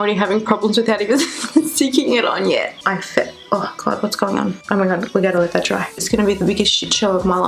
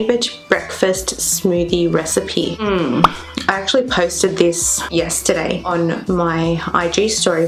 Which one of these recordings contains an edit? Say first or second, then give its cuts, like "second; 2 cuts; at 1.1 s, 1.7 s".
first; 2 cuts; at 2.7 s, 4.6 s